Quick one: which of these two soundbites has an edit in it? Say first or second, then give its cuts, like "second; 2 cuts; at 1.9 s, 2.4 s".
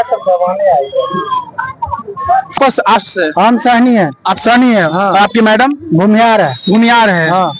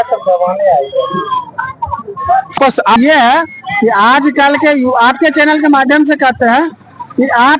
second; 1 cut; at 3.0 s